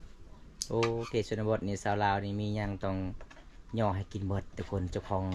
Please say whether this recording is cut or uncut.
uncut